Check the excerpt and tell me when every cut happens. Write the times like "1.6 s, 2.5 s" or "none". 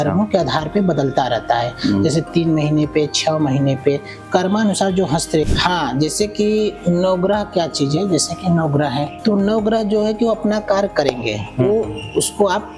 5.5 s